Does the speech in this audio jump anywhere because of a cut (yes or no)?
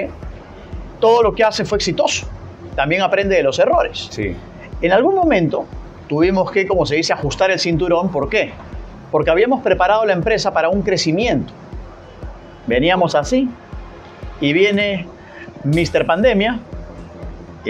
no